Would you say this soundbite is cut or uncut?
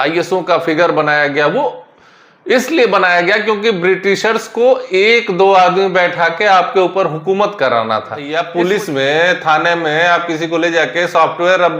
cut